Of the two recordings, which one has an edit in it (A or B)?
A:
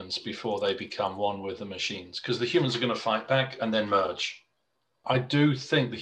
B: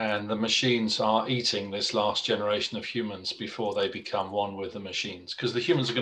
A